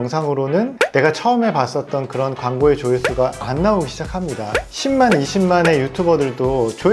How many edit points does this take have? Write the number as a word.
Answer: one